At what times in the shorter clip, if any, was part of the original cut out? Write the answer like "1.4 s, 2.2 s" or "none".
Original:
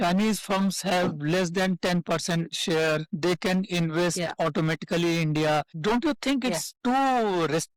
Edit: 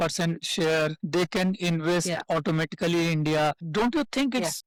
none